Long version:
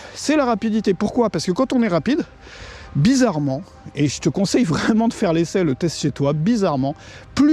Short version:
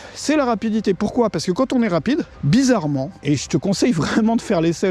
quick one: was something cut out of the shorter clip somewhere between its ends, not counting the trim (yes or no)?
yes